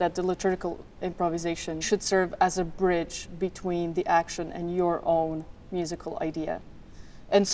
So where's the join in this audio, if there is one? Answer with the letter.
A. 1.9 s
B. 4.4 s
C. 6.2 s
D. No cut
A